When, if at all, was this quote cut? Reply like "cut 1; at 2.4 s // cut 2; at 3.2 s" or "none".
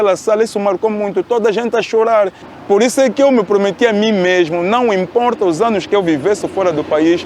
cut 1; at 2.4 s